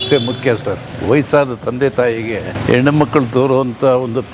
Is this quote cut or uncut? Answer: cut